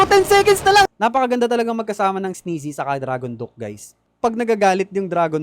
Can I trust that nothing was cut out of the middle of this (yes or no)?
no